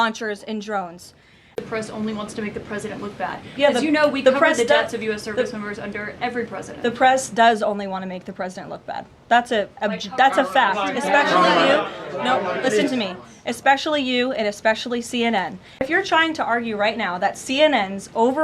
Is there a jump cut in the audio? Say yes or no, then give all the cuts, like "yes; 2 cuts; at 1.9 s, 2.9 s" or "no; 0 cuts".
yes; 2 cuts; at 1.5 s, 15.8 s